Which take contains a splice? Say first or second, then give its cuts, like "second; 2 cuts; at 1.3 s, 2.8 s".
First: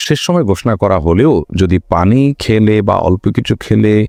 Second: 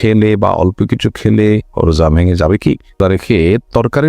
second; 1 cut; at 3.0 s